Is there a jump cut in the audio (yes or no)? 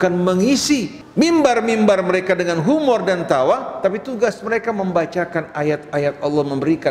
yes